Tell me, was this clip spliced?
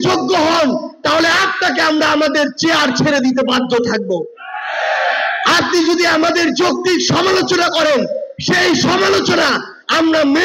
no; 0 cuts

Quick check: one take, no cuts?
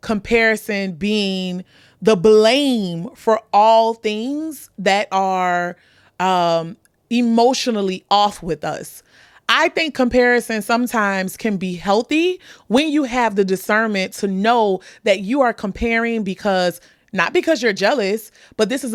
yes; 0 cuts

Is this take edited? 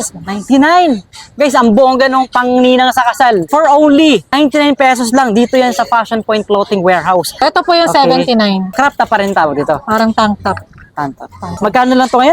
yes; 5 cuts; at 3.5 s, 4.3 s, 7.4 s, 8.7 s, 11.4 s

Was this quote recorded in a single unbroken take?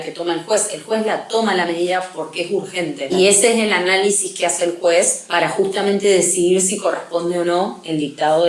no; 2 cuts; at 3.1 s, 5.2 s

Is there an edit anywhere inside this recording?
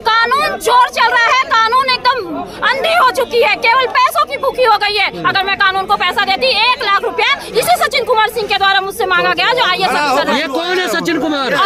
no; 0 cuts

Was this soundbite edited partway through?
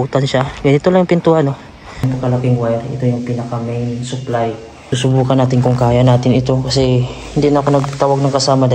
yes; 2 cuts; at 2.1 s, 4.8 s

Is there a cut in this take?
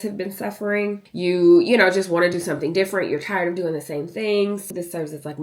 yes; 2 cuts; at 1.1 s, 4.7 s

